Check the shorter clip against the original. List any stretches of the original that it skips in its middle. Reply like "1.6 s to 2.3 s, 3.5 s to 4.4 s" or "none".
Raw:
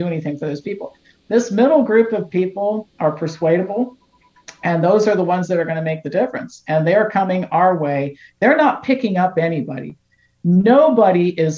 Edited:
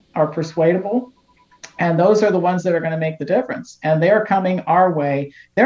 none